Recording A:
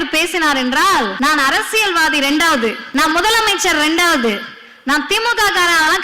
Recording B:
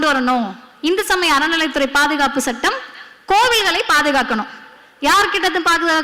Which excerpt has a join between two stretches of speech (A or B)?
A